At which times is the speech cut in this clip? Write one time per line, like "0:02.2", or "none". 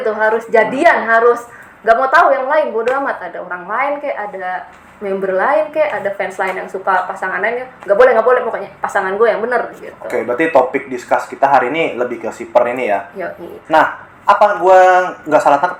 none